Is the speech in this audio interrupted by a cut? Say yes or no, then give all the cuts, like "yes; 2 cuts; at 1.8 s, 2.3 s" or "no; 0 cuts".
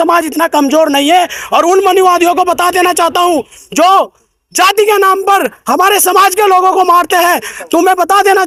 no; 0 cuts